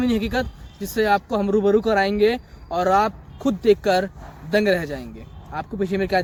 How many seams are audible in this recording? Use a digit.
0